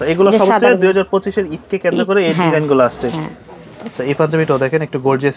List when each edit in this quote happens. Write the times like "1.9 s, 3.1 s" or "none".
none